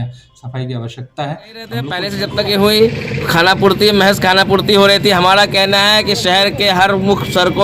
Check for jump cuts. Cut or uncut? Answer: cut